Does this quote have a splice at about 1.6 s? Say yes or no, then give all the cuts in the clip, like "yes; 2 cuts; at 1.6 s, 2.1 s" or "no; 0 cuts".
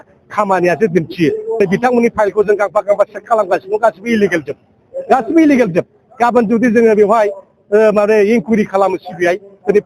yes; 1 cut; at 1.6 s